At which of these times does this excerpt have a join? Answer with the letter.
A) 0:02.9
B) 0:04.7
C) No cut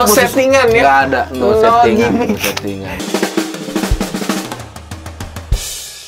A